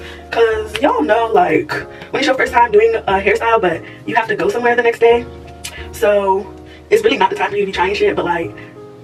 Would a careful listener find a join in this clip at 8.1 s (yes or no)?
no